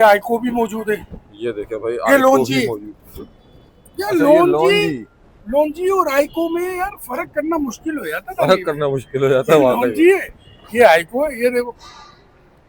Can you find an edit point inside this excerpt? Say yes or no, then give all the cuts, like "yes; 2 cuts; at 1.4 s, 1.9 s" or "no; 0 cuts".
no; 0 cuts